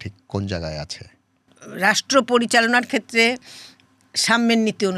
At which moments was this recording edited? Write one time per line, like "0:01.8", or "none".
0:01.6